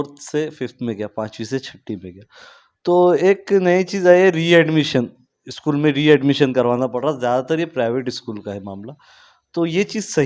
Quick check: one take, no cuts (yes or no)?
yes